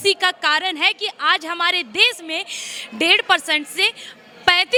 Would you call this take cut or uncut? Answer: uncut